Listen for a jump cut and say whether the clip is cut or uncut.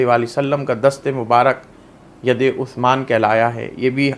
uncut